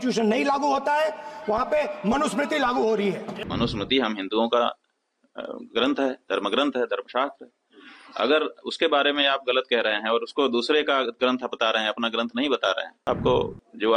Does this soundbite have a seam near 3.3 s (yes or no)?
yes